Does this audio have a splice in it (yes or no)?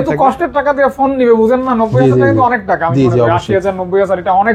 no